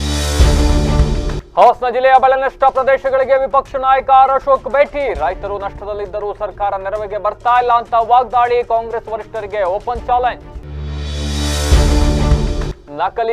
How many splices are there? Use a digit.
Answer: 1